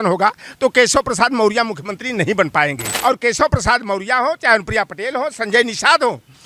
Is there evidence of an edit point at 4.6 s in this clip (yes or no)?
no